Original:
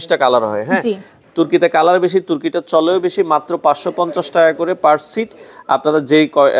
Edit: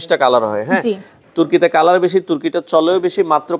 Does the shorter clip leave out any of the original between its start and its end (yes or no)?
no